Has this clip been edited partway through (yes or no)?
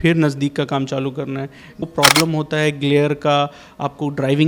yes